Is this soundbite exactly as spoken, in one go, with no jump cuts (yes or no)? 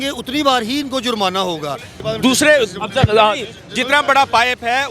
no